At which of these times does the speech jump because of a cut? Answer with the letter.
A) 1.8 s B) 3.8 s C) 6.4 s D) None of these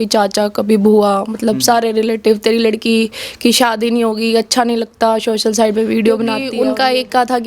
C